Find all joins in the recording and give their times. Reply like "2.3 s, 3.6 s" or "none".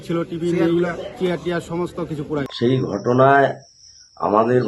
2.3 s